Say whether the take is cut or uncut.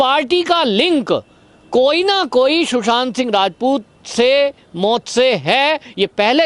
uncut